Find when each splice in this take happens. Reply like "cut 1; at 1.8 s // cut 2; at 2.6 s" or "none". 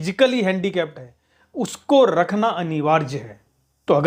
none